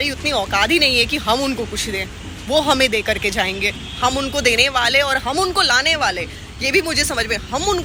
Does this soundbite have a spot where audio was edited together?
no; 0 cuts

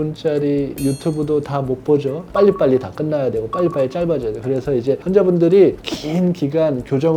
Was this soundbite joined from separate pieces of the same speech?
yes; 2 cuts; at 2.2 s, 5.8 s

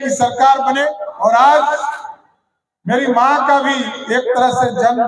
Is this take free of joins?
no; 1 cut; at 1.1 s

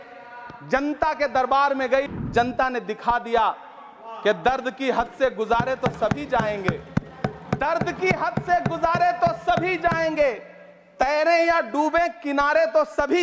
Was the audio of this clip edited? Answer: yes; 1 cut; at 2.1 s

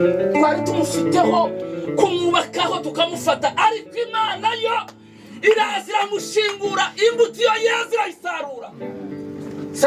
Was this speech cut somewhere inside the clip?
no; 0 cuts

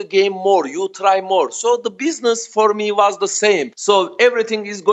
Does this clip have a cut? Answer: yes; 1 cut; at 3.7 s

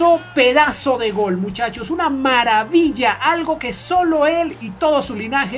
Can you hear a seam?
no; 0 cuts

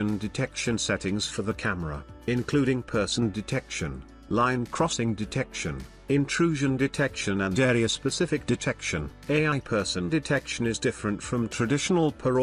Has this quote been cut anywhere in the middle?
no; 0 cuts

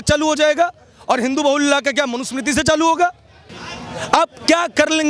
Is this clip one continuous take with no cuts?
yes; 0 cuts

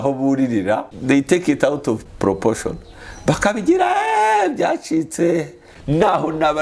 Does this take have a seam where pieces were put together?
yes; 3 cuts; at 0.9 s, 2.0 s, 5.7 s

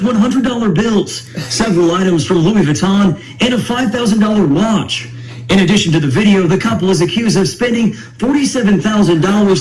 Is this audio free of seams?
yes; 0 cuts

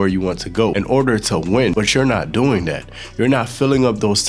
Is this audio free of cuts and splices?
no; 2 cuts; at 0.8 s, 1.7 s

